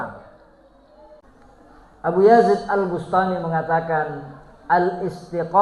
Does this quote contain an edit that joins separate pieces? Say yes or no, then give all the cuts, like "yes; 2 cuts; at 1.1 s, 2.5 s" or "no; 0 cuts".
yes; 1 cut; at 1.2 s